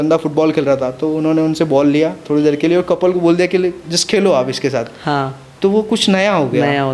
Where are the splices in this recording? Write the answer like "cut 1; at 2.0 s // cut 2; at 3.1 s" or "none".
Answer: none